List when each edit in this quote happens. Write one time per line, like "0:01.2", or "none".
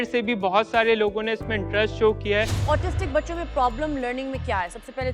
0:02.6